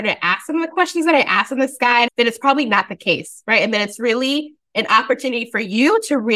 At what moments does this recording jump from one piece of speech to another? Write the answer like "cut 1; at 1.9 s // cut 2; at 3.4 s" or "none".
cut 1; at 2.1 s